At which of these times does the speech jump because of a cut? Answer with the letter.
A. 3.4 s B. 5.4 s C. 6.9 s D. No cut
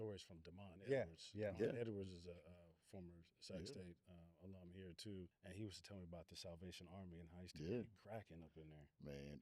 B